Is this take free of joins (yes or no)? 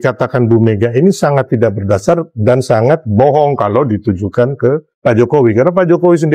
no